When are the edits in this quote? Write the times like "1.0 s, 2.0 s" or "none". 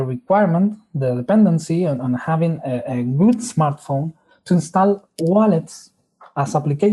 5.1 s